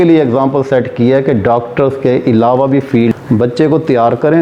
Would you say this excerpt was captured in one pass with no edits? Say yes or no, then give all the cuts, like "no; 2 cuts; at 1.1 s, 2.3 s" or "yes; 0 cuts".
no; 1 cut; at 3.1 s